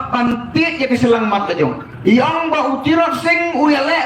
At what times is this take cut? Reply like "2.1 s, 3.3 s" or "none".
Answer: 1.9 s